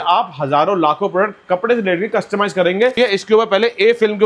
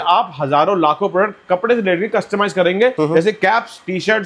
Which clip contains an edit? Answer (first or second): first